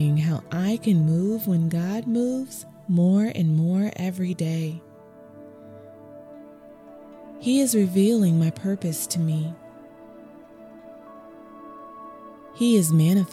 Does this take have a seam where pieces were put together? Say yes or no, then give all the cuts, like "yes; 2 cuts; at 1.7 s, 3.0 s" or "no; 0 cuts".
no; 0 cuts